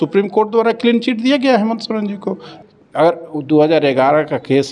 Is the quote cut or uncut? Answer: cut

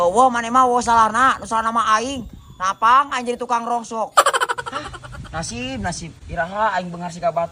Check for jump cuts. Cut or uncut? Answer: uncut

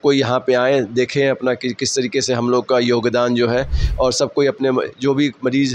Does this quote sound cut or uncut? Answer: uncut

